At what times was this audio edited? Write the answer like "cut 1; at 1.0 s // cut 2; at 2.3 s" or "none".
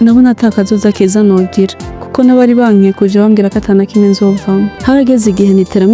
cut 1; at 4.8 s